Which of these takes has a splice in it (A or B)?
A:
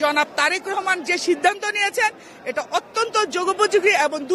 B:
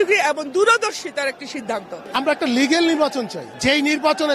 B